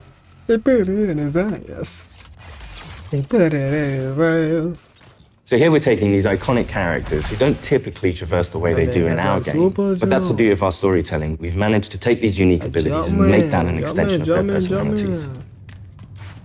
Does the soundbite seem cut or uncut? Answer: uncut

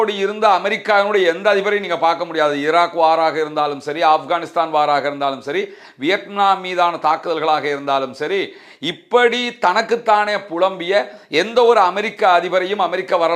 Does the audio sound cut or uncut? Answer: uncut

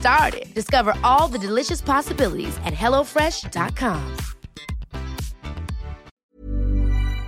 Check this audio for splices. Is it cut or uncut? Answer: cut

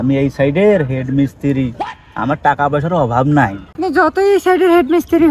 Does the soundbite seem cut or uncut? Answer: uncut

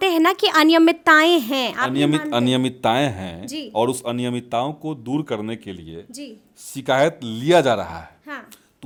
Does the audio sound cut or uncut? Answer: uncut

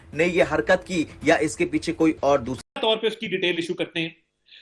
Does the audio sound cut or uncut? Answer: cut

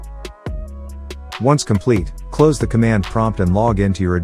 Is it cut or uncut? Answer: cut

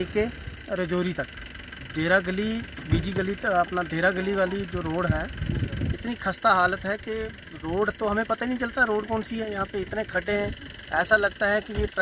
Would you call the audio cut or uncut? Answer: uncut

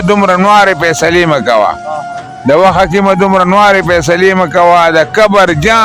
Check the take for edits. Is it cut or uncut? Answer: uncut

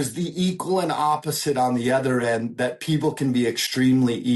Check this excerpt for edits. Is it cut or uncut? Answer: uncut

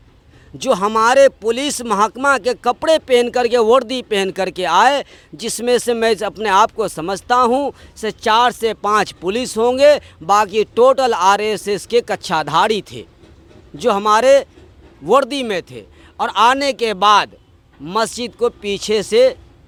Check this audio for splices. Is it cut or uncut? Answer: uncut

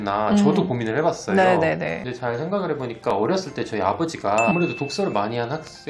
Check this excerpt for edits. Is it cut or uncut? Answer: cut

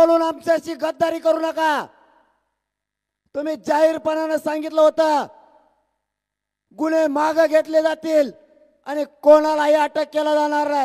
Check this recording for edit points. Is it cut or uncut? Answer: uncut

